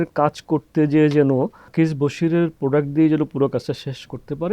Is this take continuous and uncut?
no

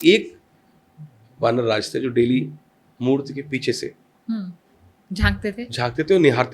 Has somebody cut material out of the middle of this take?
no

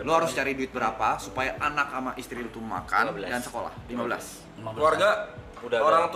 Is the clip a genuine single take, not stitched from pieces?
yes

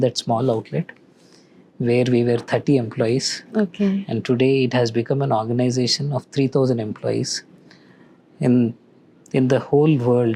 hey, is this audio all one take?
yes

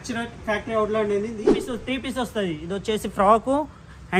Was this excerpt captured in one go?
no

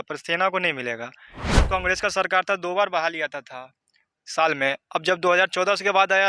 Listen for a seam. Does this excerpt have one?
yes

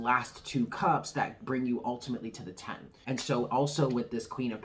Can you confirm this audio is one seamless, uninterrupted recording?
no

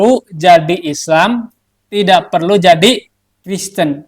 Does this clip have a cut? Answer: no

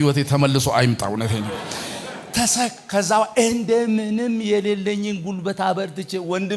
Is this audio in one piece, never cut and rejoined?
yes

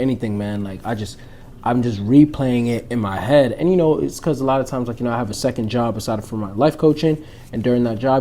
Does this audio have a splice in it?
no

